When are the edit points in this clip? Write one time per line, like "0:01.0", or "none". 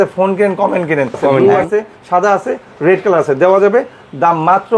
0:01.4